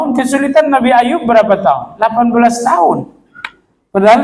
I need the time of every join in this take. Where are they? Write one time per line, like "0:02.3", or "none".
none